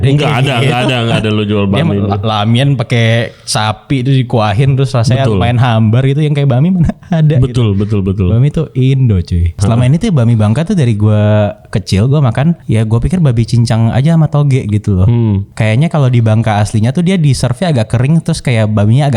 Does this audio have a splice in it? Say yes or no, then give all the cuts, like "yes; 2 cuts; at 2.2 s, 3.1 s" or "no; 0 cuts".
yes; 3 cuts; at 9.5 s, 12.6 s, 15.5 s